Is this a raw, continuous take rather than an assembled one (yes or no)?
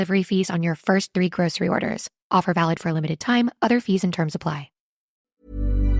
no